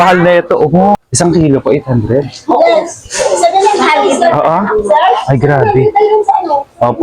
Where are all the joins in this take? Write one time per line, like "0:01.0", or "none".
0:01.0